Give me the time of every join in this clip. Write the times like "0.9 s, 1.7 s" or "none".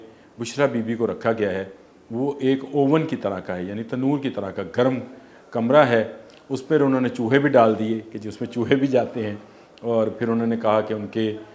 none